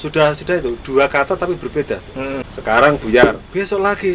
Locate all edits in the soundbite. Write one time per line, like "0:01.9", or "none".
0:02.5